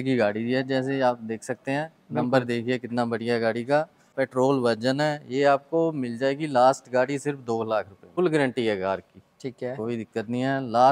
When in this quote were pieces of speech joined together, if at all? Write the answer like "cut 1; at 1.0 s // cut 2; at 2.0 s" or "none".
cut 1; at 4.1 s // cut 2; at 8.1 s